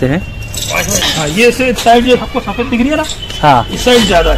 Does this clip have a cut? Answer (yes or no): yes